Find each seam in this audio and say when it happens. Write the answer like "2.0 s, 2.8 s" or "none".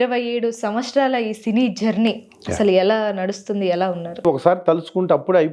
4.2 s